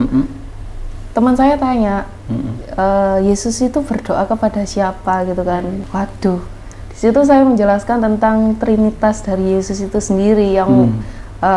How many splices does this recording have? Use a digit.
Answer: 1